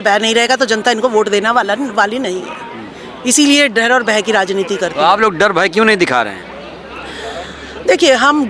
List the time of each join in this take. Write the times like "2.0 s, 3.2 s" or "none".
none